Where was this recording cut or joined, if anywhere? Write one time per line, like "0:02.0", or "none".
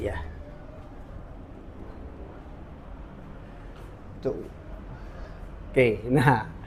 none